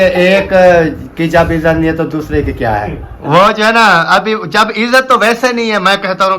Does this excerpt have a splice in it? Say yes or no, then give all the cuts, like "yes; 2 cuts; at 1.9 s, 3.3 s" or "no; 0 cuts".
yes; 1 cut; at 3.1 s